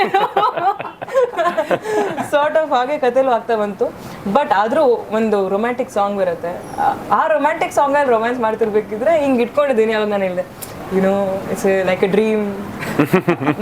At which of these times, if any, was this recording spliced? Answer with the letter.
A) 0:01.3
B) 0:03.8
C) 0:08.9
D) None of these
D